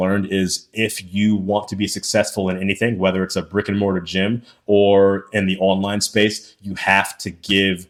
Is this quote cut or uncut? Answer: uncut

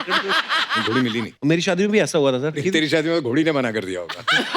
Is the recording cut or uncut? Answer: cut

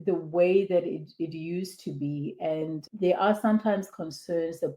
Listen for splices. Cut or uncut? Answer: uncut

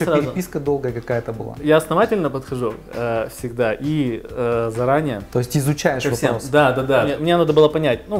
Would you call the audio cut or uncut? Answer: cut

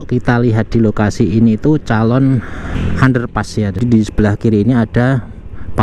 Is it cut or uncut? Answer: cut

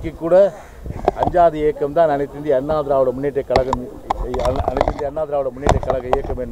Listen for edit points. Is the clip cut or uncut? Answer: uncut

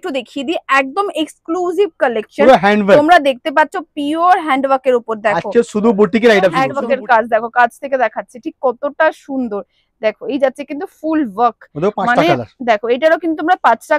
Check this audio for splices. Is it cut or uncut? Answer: cut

